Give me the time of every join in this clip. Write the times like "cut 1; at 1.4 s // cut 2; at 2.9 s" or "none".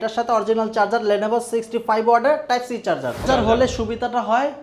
cut 1; at 3.2 s